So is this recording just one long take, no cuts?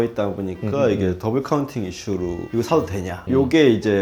no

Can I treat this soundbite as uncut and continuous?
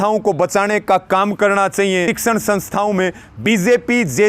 no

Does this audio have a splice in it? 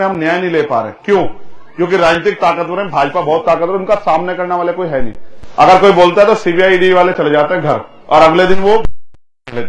no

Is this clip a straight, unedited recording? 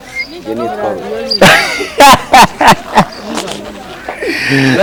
yes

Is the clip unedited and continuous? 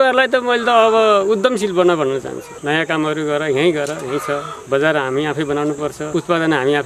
no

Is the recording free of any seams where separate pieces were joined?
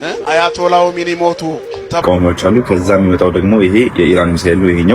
no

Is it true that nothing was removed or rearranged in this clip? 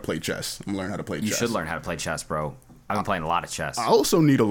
yes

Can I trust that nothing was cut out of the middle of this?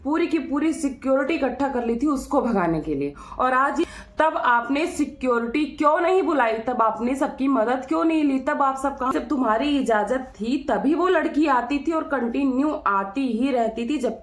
no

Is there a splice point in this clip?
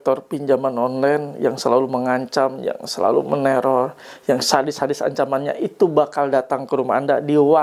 no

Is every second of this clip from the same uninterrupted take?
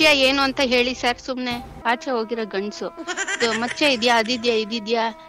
no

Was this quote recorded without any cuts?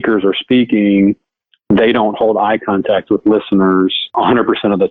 no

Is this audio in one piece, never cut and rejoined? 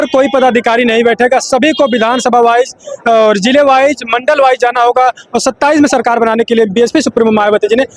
yes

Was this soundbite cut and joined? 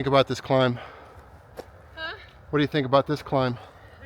no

